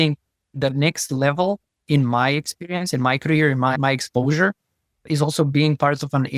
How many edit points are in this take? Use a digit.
0